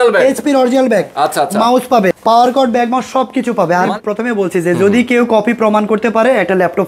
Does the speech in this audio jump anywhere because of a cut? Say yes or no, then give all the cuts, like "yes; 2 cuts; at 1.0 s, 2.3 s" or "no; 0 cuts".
yes; 3 cuts; at 1.1 s, 2.1 s, 3.9 s